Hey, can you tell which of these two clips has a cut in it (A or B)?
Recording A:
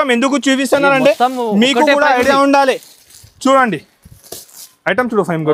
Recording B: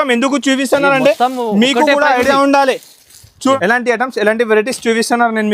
B